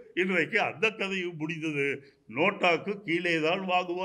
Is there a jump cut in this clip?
no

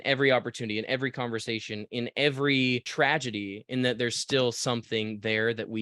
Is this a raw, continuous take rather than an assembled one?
yes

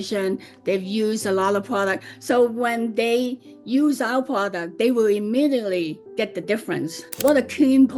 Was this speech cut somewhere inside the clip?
yes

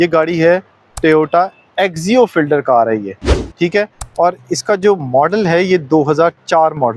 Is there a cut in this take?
no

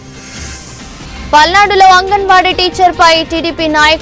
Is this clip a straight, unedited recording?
no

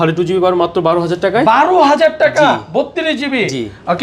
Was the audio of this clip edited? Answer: no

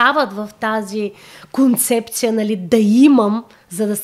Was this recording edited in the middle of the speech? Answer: no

